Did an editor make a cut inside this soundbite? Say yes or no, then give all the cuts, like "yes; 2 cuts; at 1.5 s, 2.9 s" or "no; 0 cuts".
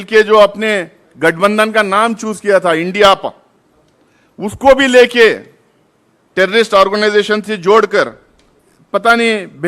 no; 0 cuts